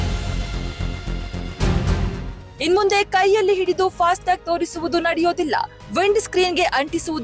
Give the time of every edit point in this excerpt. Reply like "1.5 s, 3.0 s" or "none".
2.6 s